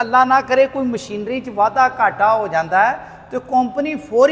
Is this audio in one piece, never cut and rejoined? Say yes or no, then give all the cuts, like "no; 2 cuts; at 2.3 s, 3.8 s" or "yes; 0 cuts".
yes; 0 cuts